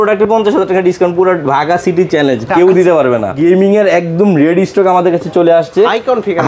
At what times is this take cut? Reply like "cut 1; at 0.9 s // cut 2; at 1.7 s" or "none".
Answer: cut 1; at 3.3 s